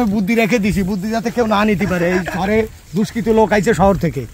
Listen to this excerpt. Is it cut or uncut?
uncut